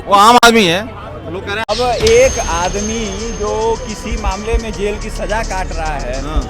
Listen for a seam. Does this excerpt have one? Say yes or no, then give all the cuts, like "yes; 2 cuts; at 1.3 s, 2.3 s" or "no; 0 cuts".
yes; 1 cut; at 1.5 s